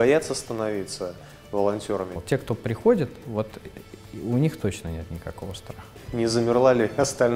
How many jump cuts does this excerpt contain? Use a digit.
2